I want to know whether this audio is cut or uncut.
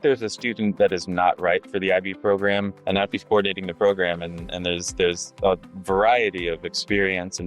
cut